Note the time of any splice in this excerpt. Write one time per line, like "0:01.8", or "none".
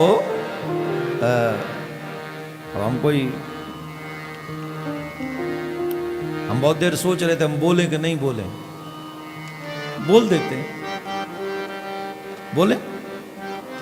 none